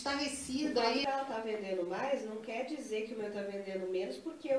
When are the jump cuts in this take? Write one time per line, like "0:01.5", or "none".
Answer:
0:01.0